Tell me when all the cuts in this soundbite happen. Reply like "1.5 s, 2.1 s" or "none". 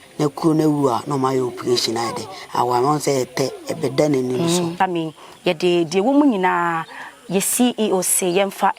4.7 s